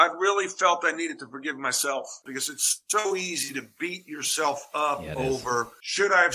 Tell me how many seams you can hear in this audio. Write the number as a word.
one